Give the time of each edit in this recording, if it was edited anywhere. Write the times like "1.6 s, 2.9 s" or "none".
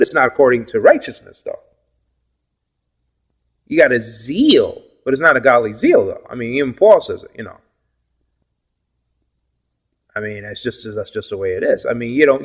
none